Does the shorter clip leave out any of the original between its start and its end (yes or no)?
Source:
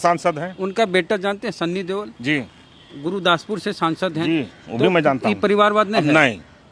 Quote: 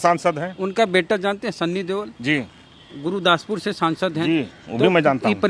no